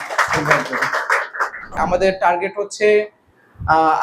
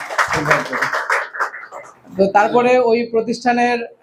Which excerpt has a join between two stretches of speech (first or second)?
first